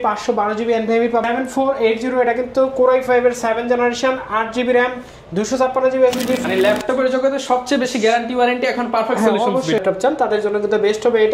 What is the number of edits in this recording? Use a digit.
3